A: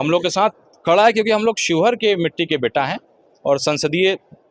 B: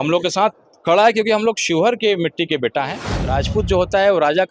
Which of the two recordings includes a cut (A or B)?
B